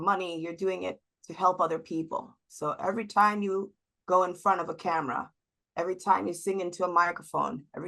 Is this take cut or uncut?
uncut